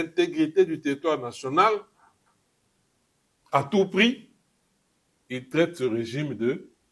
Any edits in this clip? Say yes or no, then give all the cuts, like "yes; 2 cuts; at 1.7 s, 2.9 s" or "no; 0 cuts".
no; 0 cuts